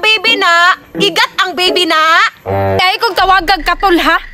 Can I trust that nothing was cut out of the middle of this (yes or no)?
no